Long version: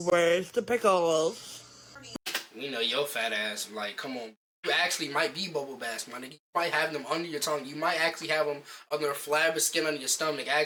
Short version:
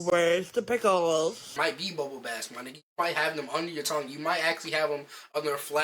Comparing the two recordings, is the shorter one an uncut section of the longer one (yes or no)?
no